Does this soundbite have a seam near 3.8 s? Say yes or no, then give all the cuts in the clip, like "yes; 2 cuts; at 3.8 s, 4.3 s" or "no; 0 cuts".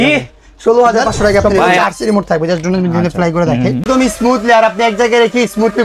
yes; 2 cuts; at 1.8 s, 3.8 s